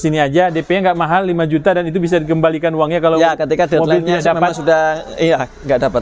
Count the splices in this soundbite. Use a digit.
0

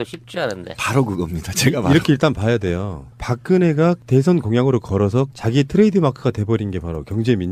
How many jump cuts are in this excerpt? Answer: 0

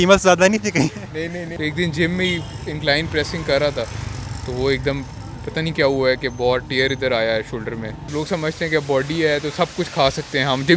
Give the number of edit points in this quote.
2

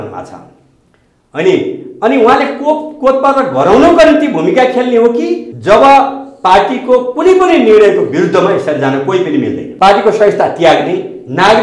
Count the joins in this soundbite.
2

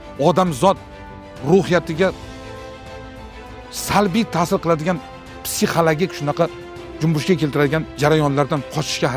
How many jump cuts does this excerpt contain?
1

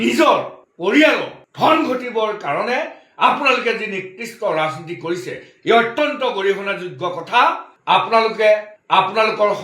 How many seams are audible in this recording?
1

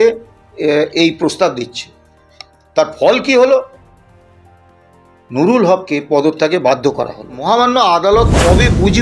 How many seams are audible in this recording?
1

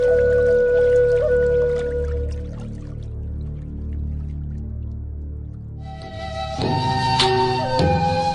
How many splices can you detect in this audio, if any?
1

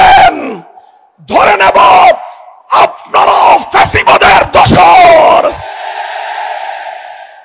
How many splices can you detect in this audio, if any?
0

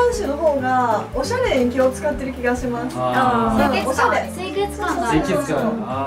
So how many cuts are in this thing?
0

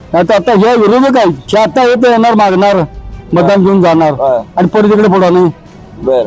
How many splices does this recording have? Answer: 1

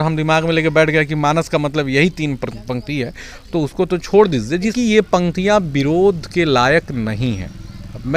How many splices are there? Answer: 1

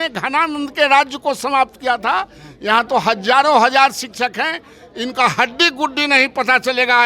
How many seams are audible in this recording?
0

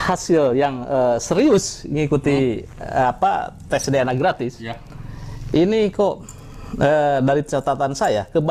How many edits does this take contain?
0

